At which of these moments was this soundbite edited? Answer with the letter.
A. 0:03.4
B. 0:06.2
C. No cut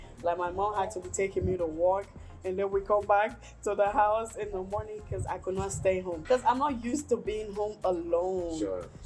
B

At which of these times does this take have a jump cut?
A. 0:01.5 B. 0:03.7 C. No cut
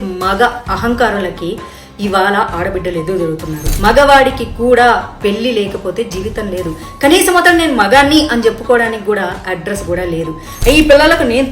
B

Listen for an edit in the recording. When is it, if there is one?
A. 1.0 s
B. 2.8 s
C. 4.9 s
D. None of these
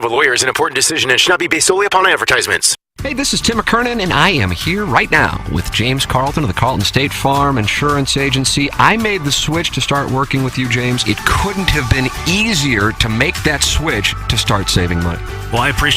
B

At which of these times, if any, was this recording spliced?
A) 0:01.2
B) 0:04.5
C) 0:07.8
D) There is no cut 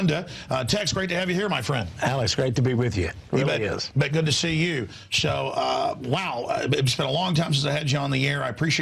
B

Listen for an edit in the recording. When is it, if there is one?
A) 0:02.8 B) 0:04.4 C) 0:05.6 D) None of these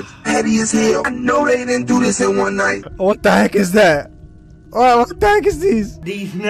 A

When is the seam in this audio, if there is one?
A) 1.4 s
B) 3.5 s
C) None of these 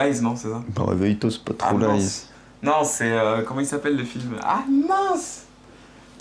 A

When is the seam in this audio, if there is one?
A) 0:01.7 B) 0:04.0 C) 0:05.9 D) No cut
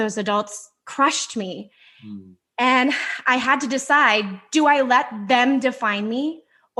D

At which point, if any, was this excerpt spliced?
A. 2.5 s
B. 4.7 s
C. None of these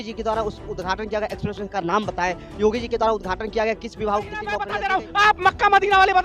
B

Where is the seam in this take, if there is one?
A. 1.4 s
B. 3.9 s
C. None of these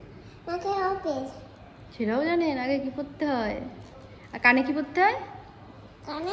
C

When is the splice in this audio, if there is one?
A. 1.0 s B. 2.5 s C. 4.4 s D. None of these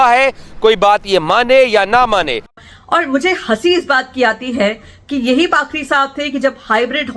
D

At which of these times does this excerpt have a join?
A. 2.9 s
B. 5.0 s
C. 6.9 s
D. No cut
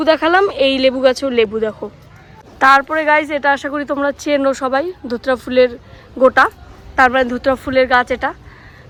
D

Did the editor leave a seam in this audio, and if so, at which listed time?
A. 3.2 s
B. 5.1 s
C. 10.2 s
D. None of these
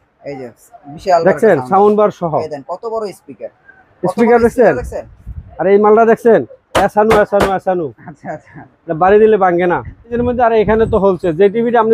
C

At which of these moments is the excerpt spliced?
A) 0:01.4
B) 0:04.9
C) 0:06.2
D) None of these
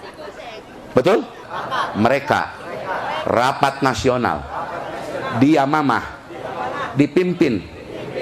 A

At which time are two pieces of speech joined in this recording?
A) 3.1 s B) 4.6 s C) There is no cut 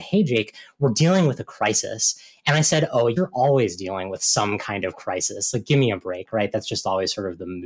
A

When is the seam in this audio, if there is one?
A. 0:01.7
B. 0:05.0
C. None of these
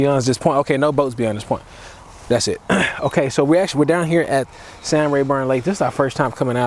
C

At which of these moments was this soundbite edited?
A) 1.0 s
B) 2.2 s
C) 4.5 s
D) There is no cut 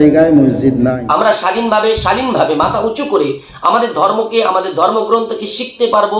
A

